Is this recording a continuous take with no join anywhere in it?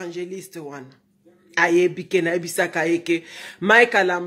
yes; 0 cuts

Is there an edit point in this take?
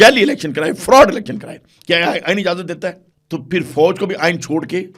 yes; 1 cut; at 3.1 s

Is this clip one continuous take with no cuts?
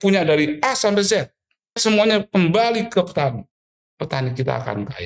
no; 1 cut; at 1.8 s

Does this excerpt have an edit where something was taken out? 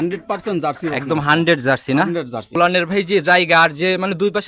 yes; 1 cut; at 2.4 s

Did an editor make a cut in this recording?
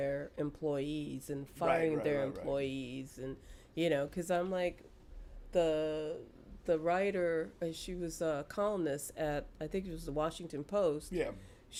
no; 0 cuts

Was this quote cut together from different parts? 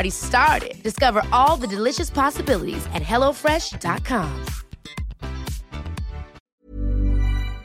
yes; 1 cut; at 6.4 s

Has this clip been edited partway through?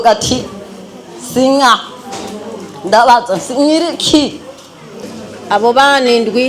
yes; 1 cut; at 5.0 s

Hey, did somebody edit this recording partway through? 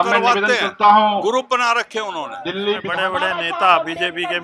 yes; 1 cut; at 2.9 s

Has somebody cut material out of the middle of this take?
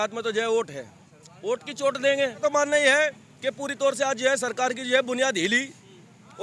yes; 1 cut; at 2.4 s

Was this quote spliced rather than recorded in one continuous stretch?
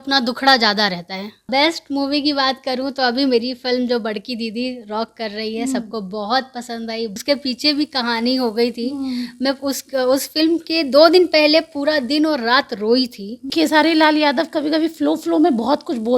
yes; 3 cuts; at 1.5 s, 7.2 s, 13.5 s

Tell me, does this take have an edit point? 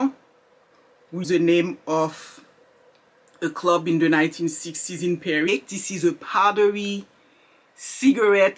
yes; 2 cuts; at 1.2 s, 5.5 s

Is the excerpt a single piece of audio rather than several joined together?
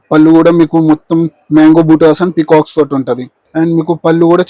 no; 1 cut; at 3.4 s

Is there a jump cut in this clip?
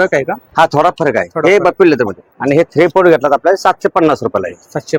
no; 0 cuts

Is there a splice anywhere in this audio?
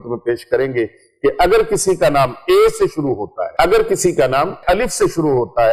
yes; 2 cuts; at 3.4 s, 4.6 s

